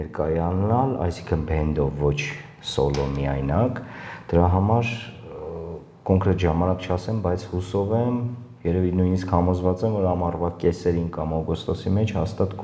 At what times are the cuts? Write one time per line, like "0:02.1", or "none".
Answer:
none